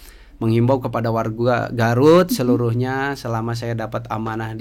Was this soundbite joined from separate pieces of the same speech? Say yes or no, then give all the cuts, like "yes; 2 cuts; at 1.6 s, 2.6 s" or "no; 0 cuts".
no; 0 cuts